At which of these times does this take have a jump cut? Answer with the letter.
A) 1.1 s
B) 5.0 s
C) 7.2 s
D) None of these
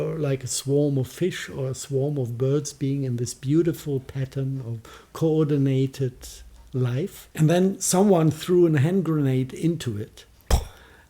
C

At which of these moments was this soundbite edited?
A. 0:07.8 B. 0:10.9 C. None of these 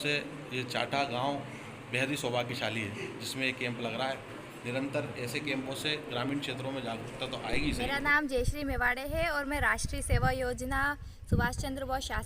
A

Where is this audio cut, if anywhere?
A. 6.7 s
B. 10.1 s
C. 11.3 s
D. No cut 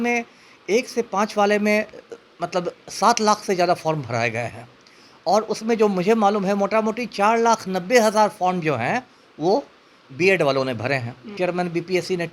C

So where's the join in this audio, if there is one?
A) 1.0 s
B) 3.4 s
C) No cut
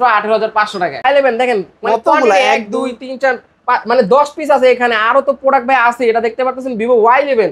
A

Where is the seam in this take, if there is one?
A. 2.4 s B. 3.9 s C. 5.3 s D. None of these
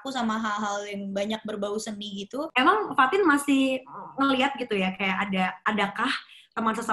A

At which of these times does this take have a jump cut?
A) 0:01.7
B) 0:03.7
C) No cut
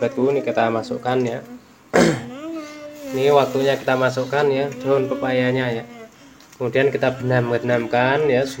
C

